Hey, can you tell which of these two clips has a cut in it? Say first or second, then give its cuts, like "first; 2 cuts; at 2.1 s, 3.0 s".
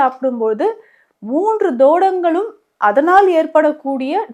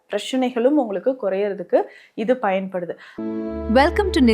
second; 1 cut; at 3.0 s